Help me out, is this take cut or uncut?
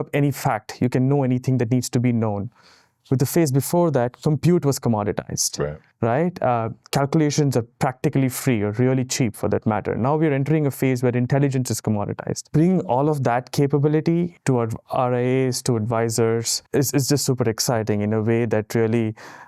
cut